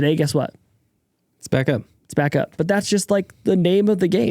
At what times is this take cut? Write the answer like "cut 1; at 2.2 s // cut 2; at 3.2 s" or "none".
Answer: cut 1; at 2.6 s